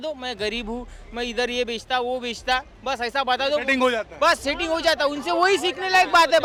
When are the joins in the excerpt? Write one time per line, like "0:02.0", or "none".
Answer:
none